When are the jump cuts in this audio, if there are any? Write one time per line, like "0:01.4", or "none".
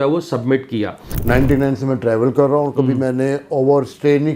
0:01.1